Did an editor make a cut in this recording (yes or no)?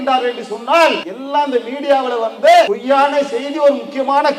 yes